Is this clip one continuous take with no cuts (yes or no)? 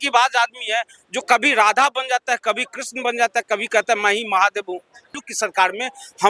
no